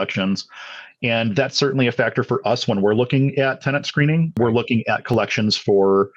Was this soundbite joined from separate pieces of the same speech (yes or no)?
yes